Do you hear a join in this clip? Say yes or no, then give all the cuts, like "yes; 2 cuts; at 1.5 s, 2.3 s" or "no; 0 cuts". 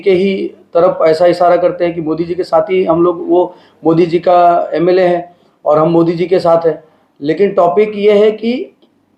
no; 0 cuts